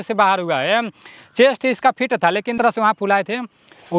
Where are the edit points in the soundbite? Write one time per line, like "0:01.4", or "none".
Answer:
0:02.5